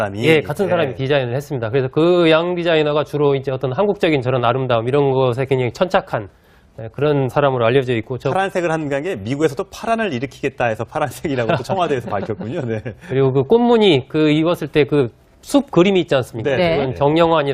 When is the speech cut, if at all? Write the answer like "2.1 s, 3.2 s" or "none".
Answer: none